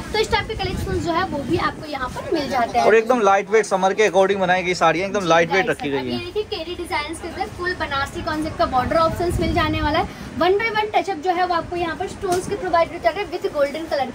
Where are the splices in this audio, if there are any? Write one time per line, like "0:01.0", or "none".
none